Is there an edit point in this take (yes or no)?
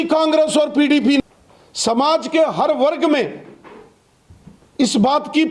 yes